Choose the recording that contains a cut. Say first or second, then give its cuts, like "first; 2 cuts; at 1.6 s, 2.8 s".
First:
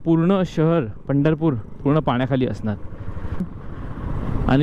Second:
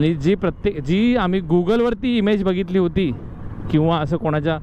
first; 1 cut; at 3.5 s